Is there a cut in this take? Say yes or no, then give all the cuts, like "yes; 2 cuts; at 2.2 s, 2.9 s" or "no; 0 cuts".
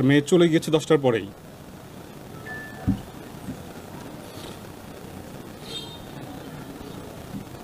no; 0 cuts